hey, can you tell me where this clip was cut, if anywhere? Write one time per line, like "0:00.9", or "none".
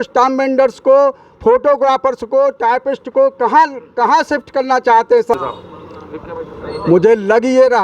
0:05.4